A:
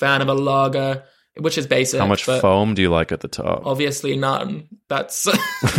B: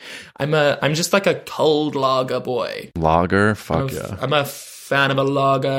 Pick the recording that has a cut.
B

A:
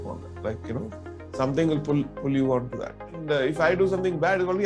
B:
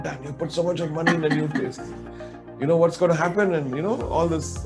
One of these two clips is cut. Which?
A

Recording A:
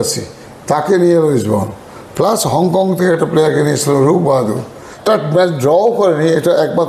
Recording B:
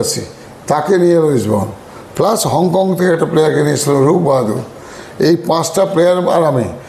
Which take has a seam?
A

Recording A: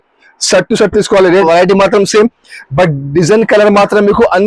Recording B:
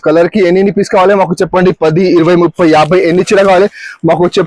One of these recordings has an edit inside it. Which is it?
A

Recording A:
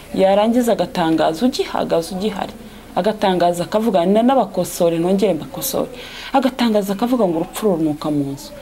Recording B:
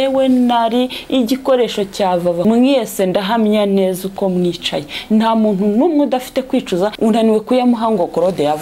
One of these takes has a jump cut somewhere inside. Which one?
B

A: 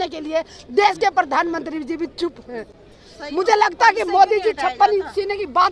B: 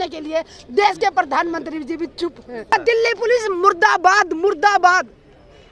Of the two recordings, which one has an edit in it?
B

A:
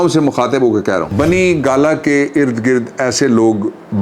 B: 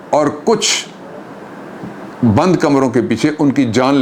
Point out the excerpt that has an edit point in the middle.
A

